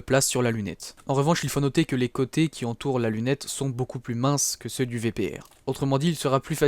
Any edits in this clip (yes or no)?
yes